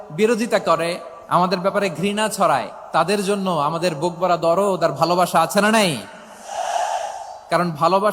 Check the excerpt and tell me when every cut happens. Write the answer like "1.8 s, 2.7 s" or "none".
1.1 s